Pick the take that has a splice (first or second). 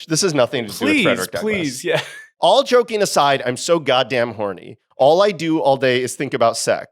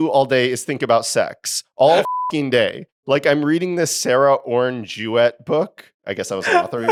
first